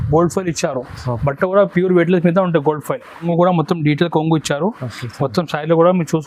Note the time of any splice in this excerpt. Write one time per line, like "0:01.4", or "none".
0:03.2